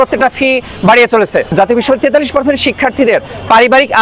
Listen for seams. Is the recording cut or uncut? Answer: cut